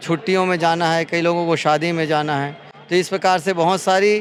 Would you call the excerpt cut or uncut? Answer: uncut